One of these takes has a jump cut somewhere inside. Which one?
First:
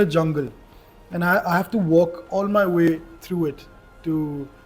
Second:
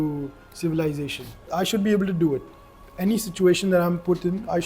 second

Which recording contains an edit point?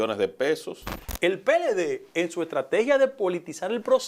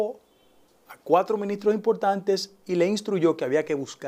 first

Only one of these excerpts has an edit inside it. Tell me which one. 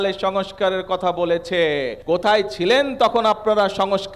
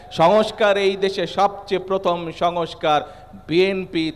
first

